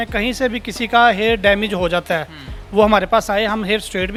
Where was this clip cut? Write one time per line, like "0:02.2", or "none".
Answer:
none